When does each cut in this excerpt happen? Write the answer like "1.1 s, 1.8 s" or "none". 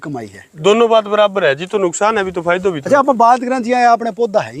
none

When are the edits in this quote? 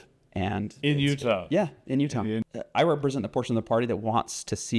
2.4 s

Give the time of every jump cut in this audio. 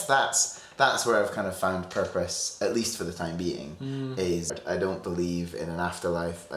4.5 s

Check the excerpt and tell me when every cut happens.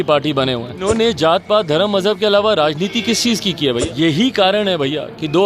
0.9 s, 3.9 s

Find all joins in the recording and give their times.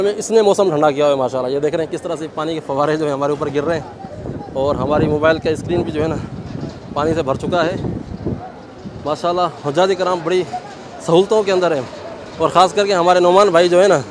none

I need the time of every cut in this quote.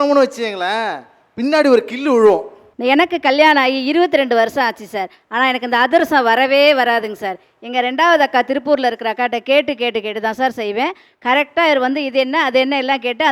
2.7 s

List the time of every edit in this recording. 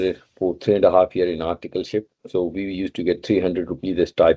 none

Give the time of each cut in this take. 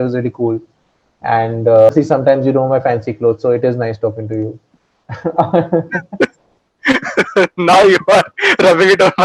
1.9 s

